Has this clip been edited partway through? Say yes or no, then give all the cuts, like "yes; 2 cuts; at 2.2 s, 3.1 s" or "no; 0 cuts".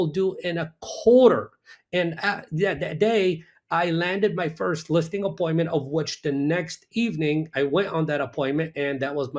no; 0 cuts